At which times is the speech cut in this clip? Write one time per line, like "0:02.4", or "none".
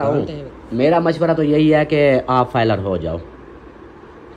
none